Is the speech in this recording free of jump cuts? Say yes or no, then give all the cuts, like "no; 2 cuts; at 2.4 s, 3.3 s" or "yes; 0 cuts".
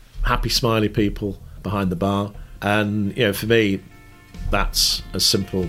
no; 2 cuts; at 1.5 s, 2.4 s